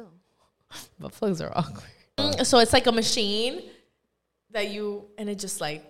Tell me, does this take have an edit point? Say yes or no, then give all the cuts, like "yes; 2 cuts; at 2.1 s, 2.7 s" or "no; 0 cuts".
yes; 1 cut; at 2.2 s